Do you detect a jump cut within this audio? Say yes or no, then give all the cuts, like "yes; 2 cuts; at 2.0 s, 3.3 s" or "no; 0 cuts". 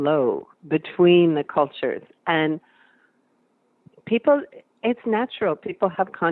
no; 0 cuts